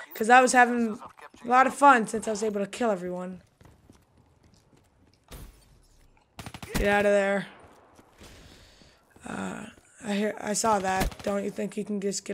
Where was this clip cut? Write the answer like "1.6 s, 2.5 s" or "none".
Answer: none